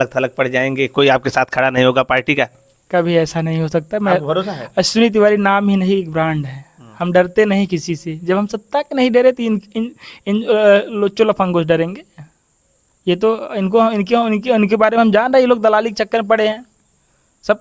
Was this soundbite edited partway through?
no; 0 cuts

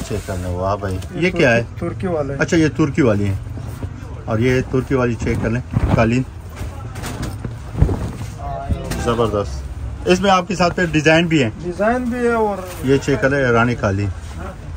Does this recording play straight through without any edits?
no; 2 cuts; at 1.0 s, 12.6 s

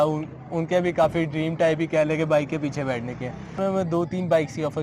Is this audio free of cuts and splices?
no; 1 cut; at 3.6 s

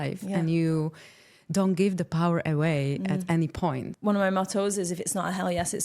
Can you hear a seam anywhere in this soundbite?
yes; 1 cut; at 3.9 s

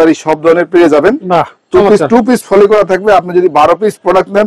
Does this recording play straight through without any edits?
yes; 0 cuts

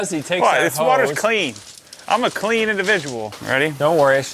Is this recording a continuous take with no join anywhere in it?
no; 1 cut; at 3.4 s

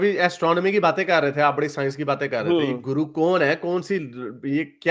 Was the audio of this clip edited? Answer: no; 0 cuts

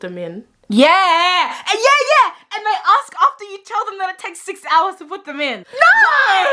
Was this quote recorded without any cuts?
no; 1 cut; at 5.6 s

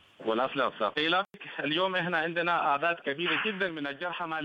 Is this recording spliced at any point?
yes; 1 cut; at 1.4 s

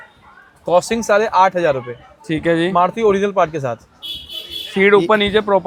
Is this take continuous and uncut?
yes; 0 cuts

